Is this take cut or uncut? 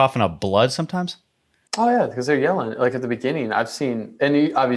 uncut